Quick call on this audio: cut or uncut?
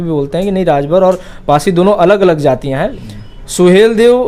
uncut